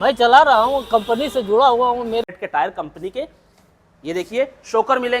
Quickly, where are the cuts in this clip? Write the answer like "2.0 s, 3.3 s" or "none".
2.2 s